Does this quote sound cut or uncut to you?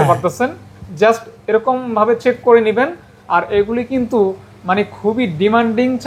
uncut